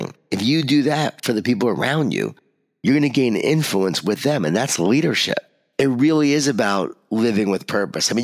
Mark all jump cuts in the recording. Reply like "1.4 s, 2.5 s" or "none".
5.6 s

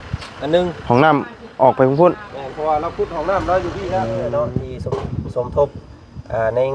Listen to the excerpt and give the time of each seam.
4.1 s

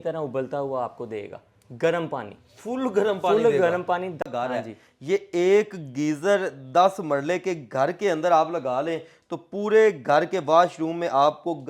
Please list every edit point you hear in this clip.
4.2 s

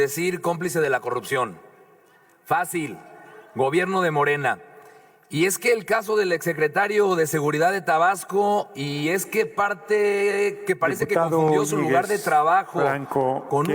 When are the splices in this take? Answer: none

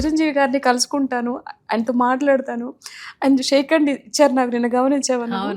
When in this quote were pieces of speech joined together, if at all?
none

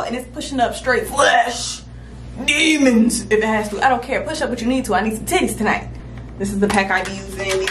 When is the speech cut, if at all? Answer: none

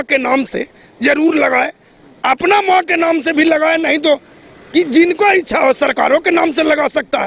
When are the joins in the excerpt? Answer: none

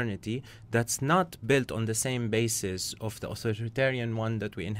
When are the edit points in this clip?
none

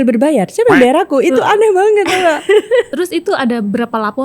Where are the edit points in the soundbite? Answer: 2.9 s

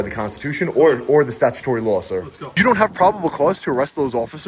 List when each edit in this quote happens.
2.5 s

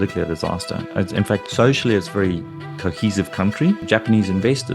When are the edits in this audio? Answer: 1.5 s, 3.8 s

